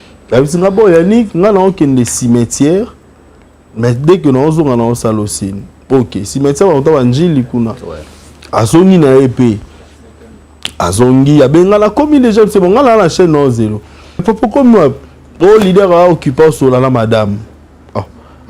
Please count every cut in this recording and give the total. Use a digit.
1